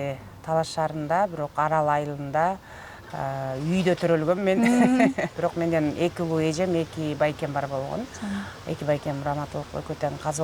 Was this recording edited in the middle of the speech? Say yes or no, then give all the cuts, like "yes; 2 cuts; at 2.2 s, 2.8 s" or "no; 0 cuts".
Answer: yes; 1 cut; at 5.3 s